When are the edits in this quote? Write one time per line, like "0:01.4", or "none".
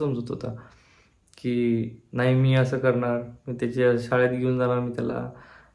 none